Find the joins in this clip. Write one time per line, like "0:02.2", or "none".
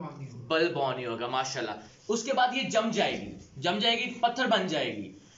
0:01.9